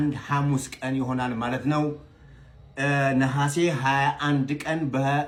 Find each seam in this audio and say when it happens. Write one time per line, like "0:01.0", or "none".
none

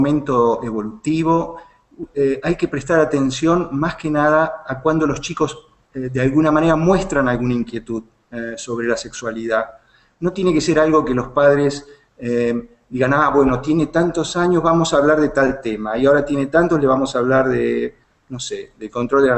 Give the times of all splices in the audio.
none

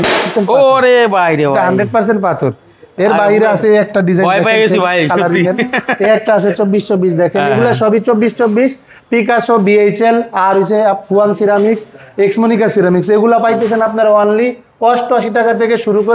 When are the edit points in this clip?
none

